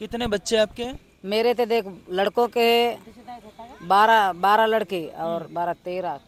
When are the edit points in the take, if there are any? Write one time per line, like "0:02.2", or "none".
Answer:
none